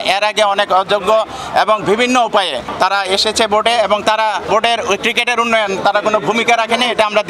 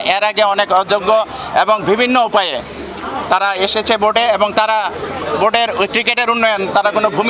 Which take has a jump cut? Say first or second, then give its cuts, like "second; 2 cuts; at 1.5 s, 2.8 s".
first; 2 cuts; at 2.7 s, 4.5 s